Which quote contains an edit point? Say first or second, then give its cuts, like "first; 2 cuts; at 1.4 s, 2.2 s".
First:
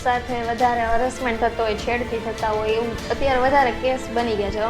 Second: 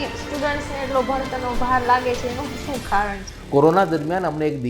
second; 1 cut; at 3.3 s